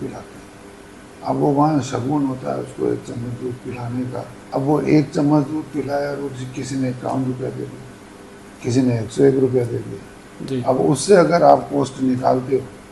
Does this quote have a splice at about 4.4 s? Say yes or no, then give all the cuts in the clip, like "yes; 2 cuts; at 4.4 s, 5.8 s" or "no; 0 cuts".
yes; 1 cut; at 4.4 s